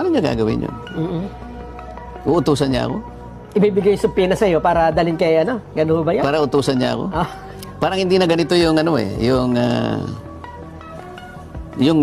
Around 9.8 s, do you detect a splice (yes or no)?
no